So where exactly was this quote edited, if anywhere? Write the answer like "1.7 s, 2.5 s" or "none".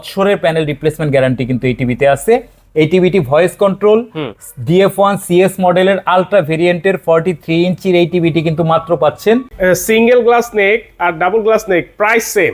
9.5 s